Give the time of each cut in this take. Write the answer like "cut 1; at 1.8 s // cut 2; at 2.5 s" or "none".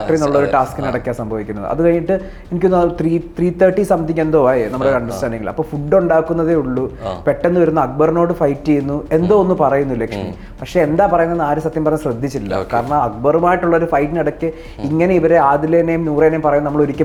none